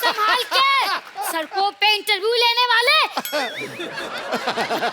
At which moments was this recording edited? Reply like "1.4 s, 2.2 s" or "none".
1.1 s